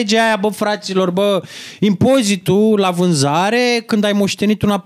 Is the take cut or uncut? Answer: uncut